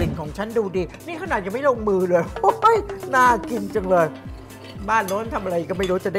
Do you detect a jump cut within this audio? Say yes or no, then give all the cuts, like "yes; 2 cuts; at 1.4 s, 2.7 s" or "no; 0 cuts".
no; 0 cuts